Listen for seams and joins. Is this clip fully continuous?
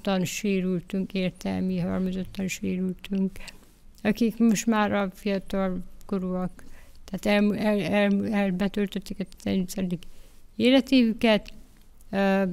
yes; 0 cuts

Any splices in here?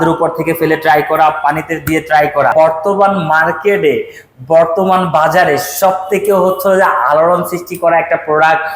yes; 1 cut; at 2.5 s

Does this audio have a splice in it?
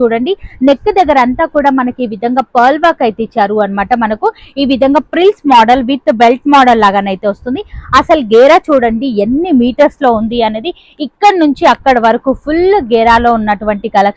no; 0 cuts

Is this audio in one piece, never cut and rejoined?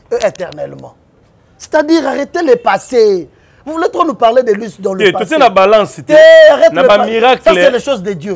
yes; 0 cuts

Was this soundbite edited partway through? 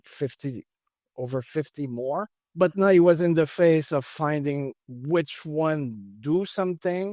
no; 0 cuts

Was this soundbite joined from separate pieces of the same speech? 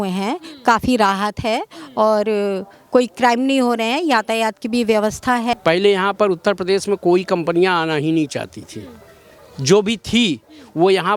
yes; 1 cut; at 5.5 s

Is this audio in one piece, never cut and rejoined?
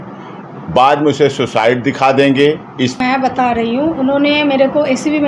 no; 1 cut; at 3.0 s

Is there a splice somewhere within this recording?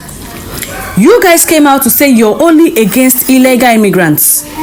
no; 0 cuts

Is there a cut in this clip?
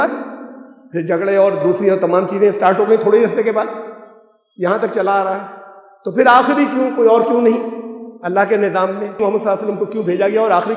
yes; 1 cut; at 9.2 s

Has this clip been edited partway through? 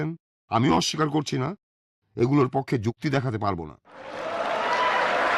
yes; 1 cut; at 4.1 s

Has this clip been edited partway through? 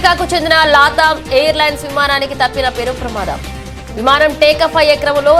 no; 0 cuts

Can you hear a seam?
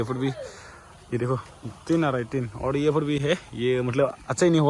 no; 0 cuts

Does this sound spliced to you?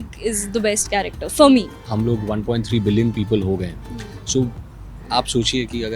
yes; 1 cut; at 1.8 s

